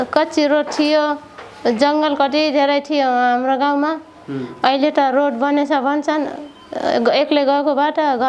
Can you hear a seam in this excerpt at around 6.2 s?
no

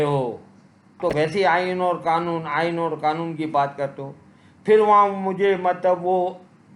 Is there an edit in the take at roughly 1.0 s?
yes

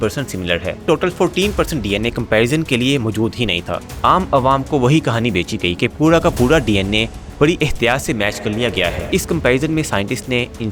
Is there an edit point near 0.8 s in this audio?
yes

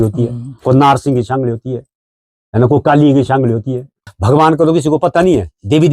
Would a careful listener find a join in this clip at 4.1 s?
yes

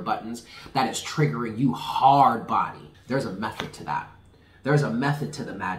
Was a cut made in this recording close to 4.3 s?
no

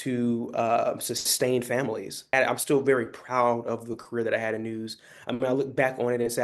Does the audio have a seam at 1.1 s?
no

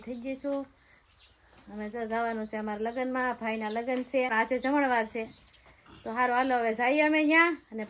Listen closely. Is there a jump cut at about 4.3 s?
yes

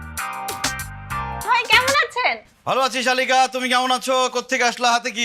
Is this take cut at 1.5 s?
yes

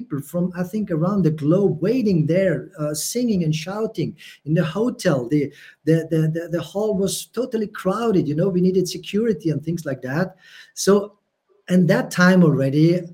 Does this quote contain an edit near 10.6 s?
no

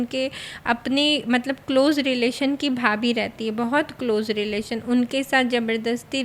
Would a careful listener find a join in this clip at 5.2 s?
no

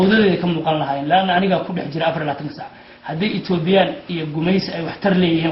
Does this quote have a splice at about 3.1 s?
no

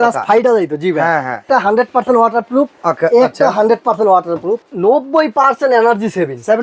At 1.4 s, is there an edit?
yes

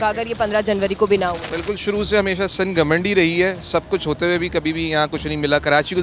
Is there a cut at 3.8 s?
no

